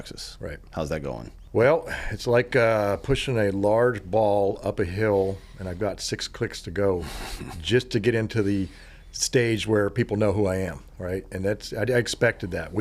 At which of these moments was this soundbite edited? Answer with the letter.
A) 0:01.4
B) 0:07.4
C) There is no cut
A